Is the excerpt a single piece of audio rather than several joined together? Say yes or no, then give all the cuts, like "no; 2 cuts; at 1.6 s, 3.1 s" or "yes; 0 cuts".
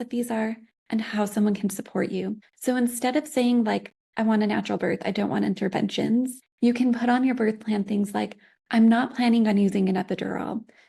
no; 3 cuts; at 2.5 s, 4.0 s, 6.4 s